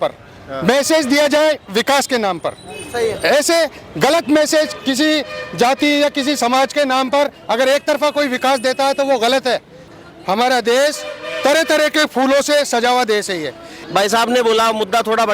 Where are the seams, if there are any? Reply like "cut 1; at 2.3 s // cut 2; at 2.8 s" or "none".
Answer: cut 1; at 10.0 s // cut 2; at 13.7 s